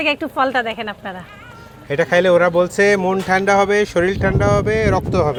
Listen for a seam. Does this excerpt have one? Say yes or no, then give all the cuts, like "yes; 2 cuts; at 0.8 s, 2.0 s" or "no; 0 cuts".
no; 0 cuts